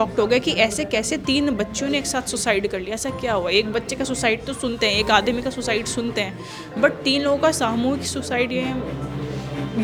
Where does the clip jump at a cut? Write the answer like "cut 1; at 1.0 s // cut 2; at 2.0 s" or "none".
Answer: none